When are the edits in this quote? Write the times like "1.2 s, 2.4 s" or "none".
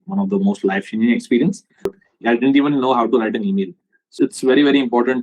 1.9 s, 4.0 s